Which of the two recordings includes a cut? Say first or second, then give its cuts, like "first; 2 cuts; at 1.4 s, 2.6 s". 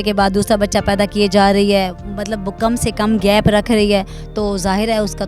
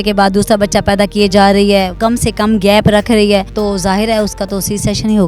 second; 2 cuts; at 1.9 s, 3.5 s